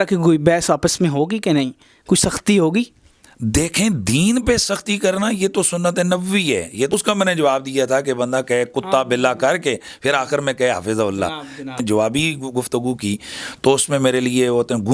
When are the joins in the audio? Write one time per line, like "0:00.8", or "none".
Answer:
0:06.9
0:11.8